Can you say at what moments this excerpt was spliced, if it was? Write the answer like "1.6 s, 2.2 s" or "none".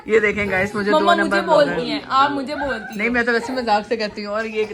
none